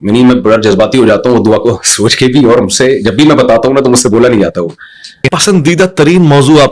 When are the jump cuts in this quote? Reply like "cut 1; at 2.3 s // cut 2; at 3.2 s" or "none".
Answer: cut 1; at 5.4 s

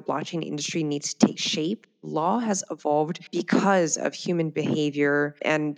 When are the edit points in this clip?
cut 1; at 2.0 s

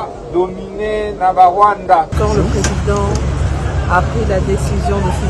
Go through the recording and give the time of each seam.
cut 1; at 2.1 s

